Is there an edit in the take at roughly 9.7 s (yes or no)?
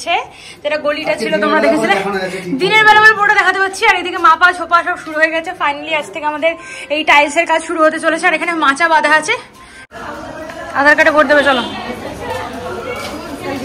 yes